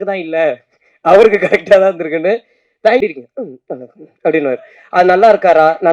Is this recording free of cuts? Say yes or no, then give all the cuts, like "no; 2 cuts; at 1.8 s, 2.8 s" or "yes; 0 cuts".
no; 1 cut; at 3.0 s